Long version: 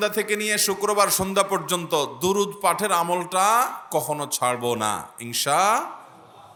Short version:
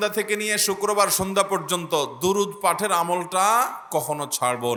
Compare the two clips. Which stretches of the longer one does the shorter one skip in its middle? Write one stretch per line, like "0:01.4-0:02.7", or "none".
none